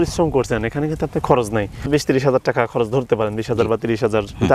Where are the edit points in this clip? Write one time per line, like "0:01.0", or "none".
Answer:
0:01.9